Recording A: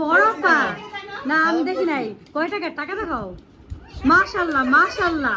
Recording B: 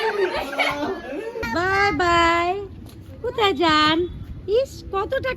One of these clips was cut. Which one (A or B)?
B